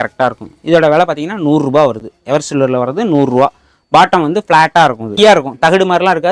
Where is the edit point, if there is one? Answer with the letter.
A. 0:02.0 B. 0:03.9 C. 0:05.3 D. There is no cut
D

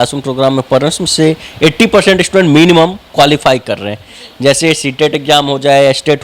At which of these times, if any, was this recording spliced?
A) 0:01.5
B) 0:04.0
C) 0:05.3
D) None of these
D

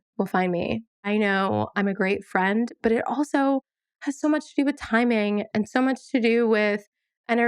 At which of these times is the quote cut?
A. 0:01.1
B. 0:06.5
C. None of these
A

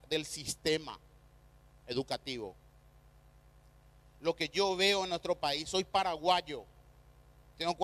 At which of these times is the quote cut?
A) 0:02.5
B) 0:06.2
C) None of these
B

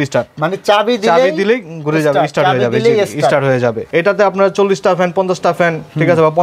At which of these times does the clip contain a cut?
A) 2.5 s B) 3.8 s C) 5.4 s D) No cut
B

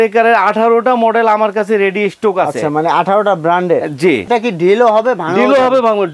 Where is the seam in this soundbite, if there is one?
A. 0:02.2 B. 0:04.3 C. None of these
B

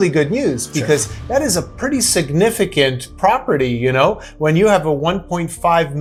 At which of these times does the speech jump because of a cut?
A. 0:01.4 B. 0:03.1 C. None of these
C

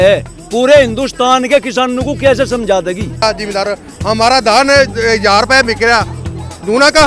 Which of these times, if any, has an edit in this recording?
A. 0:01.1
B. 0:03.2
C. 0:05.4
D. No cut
B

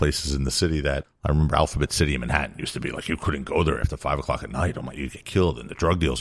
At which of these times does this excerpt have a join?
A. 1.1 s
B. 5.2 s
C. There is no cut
A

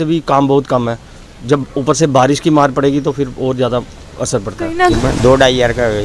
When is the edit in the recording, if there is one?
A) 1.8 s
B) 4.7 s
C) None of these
B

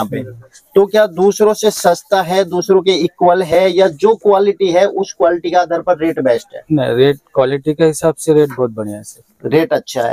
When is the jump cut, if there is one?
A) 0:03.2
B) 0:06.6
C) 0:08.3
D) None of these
D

